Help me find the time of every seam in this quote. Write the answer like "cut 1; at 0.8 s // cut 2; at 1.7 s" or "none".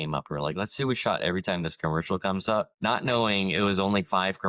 cut 1; at 2.7 s